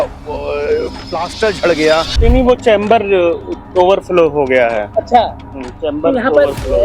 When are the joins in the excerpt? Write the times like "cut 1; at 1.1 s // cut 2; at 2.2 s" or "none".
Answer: cut 1; at 2.1 s